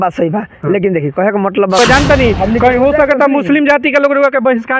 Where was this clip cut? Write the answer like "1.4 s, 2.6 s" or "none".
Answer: 1.8 s